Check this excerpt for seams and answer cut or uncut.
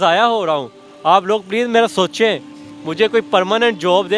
uncut